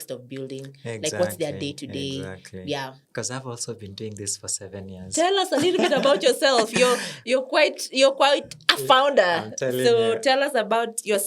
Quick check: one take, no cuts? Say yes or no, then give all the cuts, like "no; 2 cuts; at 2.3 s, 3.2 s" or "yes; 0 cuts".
no; 1 cut; at 3.0 s